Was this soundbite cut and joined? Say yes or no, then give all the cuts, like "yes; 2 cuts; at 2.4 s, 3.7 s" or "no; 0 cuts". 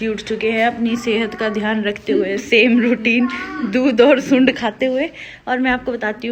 no; 0 cuts